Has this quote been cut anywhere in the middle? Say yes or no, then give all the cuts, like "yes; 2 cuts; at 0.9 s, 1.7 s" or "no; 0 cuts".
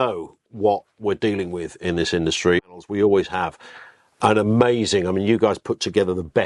yes; 1 cut; at 2.7 s